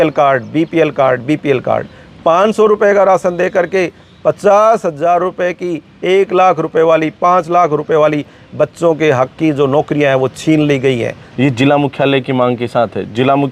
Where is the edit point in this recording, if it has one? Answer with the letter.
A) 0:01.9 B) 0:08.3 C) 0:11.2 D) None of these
C